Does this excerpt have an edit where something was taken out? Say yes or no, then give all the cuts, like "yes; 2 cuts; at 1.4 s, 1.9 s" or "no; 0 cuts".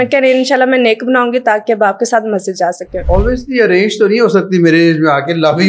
yes; 1 cut; at 2.9 s